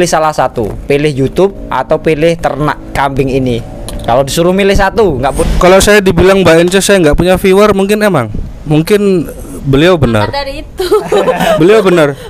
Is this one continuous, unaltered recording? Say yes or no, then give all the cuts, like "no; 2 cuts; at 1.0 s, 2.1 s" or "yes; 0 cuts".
no; 1 cut; at 5.2 s